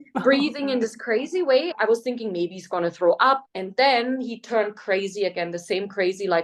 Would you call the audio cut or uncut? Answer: cut